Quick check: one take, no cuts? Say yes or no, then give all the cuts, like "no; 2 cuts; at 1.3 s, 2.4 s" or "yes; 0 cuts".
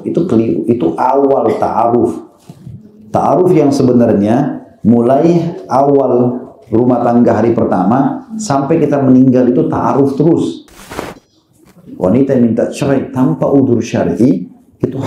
no; 1 cut; at 11.2 s